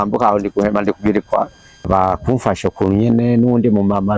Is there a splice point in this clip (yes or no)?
yes